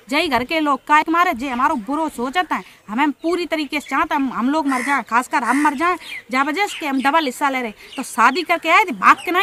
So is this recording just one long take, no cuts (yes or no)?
yes